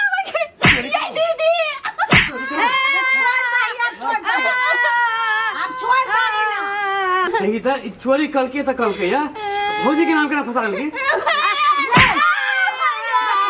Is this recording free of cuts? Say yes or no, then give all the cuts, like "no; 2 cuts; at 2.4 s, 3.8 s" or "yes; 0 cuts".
yes; 0 cuts